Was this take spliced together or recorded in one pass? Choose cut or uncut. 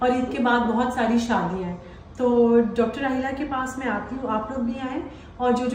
uncut